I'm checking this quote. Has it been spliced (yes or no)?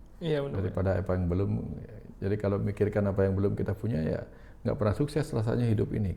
no